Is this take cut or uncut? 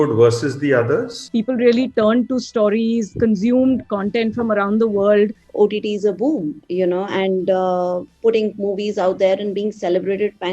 cut